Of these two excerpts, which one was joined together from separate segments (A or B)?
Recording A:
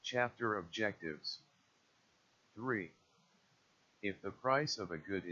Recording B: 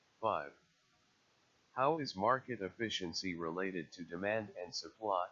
A